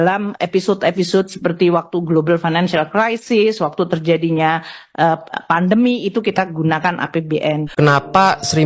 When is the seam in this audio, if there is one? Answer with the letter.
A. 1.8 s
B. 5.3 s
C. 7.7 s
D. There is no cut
C